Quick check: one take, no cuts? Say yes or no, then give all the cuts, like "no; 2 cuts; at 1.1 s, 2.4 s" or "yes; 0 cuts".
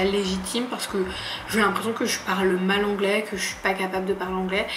yes; 0 cuts